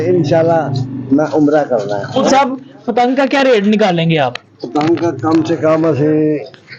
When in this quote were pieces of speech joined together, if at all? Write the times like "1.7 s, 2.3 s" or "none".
2.3 s